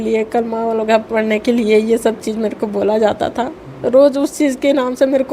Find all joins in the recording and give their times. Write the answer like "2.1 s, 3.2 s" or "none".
none